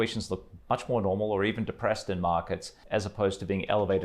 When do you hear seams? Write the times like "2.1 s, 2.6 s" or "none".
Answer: 2.8 s